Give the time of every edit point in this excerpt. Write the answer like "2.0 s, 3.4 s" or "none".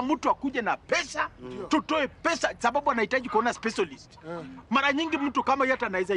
none